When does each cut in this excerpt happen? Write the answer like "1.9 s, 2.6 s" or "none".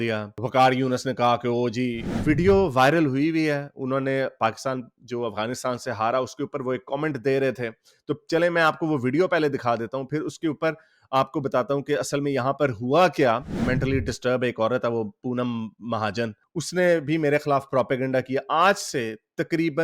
2.1 s, 13.6 s